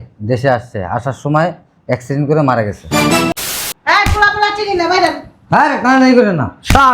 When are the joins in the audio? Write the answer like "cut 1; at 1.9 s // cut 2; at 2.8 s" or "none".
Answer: cut 1; at 3.3 s